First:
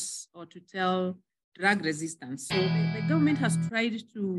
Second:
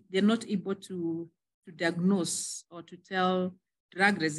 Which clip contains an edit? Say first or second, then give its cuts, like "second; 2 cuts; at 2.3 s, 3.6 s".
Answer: first; 1 cut; at 2.9 s